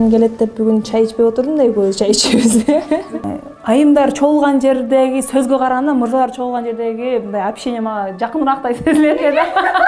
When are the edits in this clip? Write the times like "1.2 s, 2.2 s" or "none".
3.1 s